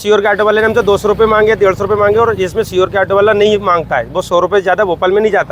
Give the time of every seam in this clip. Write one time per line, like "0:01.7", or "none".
none